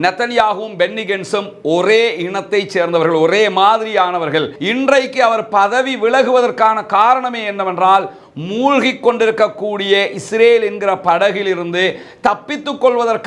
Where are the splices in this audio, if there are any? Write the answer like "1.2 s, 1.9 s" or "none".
4.5 s